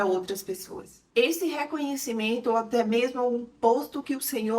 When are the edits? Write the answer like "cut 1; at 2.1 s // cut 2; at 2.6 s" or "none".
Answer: cut 1; at 1.0 s